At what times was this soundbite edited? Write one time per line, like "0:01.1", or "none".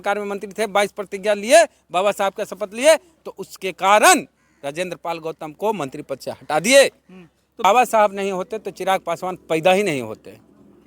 0:07.6